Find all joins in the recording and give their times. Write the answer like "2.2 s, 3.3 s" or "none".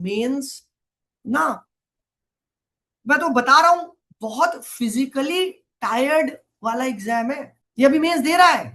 7.6 s